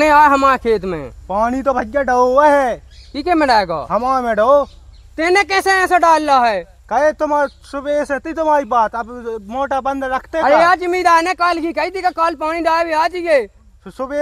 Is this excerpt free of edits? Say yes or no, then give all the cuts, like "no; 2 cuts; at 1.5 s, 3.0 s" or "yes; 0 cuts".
yes; 0 cuts